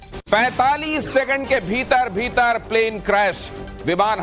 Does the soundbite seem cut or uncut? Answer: cut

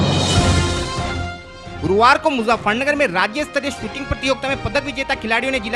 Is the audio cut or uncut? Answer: cut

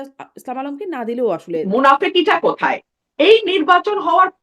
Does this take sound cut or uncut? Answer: cut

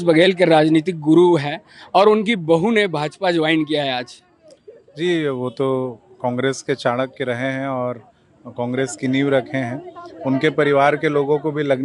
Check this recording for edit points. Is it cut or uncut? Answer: uncut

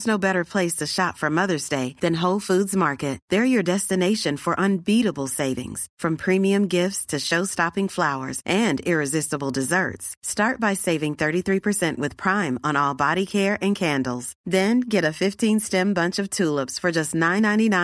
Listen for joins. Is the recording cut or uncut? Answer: uncut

